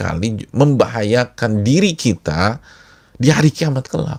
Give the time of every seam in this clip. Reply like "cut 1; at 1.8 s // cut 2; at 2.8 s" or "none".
none